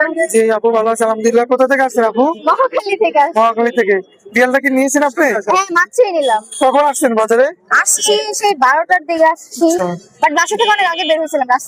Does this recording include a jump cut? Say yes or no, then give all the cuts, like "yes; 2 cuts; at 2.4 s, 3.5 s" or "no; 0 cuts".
no; 0 cuts